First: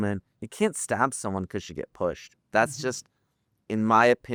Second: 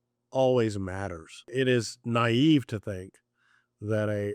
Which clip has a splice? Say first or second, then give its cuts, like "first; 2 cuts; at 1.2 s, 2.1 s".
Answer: second; 1 cut; at 1.5 s